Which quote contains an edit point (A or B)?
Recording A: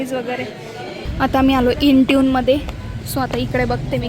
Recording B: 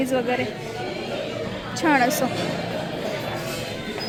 A